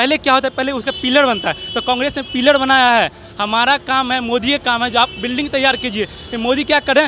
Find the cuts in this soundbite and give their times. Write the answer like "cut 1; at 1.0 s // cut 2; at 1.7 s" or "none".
none